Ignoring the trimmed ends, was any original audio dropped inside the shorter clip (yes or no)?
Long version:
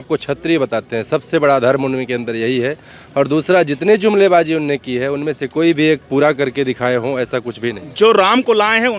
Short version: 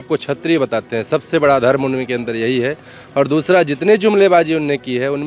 no